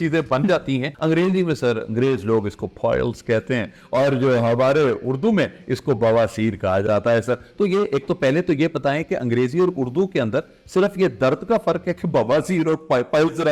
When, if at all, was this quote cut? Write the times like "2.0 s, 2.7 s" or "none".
0.9 s